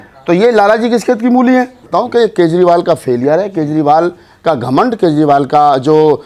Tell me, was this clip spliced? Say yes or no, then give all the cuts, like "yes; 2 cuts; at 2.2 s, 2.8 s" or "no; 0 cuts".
yes; 1 cut; at 1.8 s